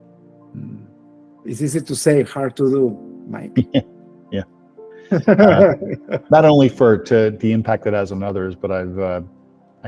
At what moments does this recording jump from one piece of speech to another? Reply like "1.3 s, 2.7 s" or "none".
0.9 s

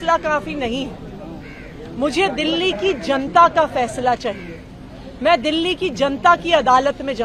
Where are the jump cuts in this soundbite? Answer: none

